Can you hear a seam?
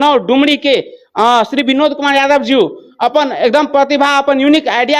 no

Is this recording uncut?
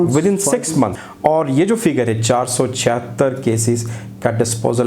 no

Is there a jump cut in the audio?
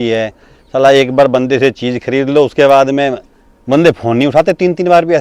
no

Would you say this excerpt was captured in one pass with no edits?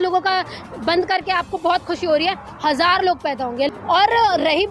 no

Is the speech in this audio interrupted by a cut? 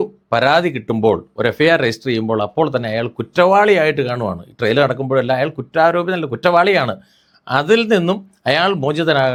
no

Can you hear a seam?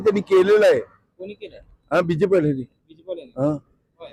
no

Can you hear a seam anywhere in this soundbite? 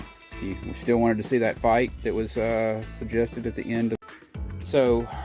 yes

